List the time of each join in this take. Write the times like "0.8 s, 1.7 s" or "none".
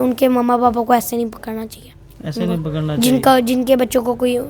none